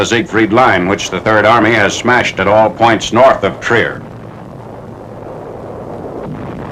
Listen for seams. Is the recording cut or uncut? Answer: uncut